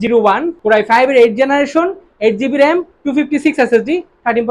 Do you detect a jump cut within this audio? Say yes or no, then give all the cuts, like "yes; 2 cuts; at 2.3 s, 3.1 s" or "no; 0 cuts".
no; 0 cuts